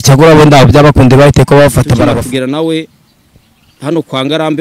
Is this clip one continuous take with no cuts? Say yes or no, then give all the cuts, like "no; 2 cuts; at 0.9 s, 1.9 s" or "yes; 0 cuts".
no; 1 cut; at 2.0 s